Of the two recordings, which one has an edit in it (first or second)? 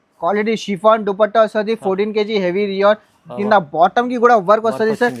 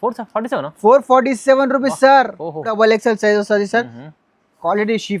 second